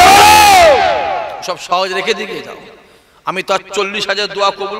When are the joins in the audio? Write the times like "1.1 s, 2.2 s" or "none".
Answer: 1.3 s

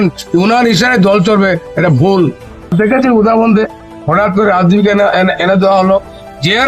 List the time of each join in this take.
2.7 s

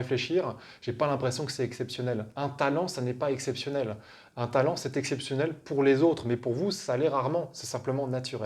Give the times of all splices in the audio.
none

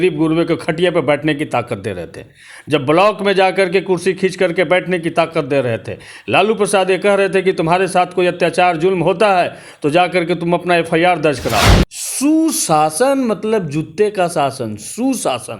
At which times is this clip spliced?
11.8 s

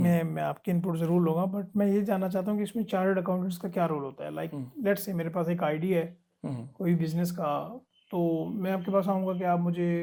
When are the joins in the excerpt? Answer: none

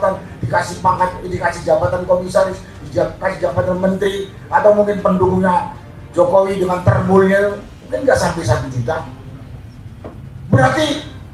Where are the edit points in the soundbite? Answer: none

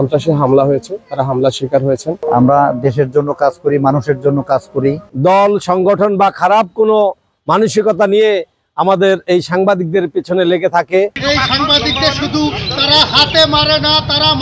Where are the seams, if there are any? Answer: 2.2 s, 5.1 s, 11.2 s

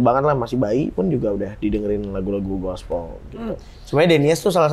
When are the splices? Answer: 3.7 s

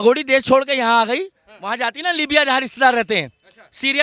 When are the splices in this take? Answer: none

